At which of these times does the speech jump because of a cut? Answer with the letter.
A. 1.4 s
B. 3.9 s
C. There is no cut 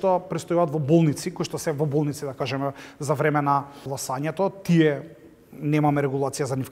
B